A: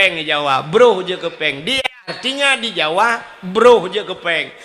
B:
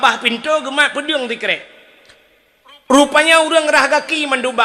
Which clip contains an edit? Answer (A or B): A